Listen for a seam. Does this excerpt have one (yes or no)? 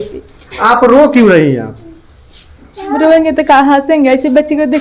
no